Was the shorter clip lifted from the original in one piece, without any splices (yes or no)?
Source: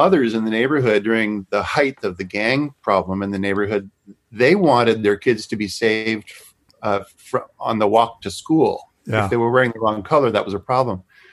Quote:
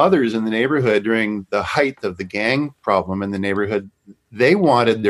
yes